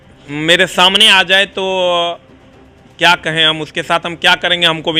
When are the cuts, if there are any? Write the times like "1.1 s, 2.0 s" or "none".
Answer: none

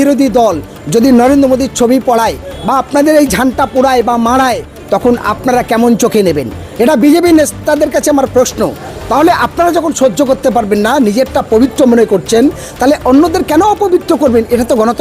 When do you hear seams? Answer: none

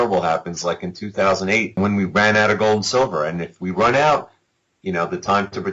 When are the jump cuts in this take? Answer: 1.8 s

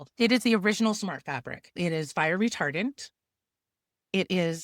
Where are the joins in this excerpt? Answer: 1.8 s

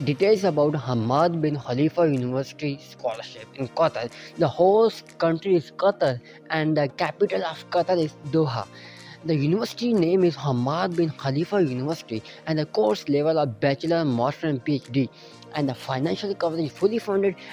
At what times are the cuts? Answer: none

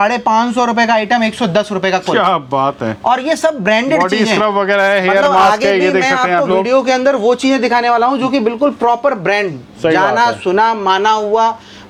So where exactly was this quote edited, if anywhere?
none

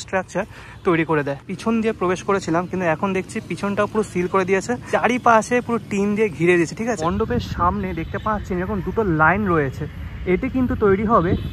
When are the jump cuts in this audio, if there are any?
1.5 s, 4.8 s, 7.0 s

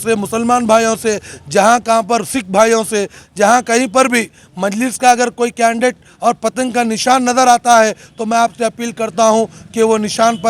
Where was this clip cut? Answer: none

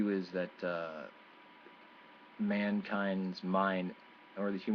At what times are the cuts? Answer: 1.9 s

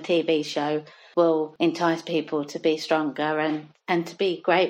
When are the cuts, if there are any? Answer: 1.0 s, 1.5 s

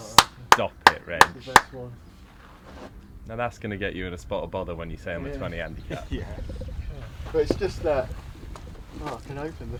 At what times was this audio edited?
none

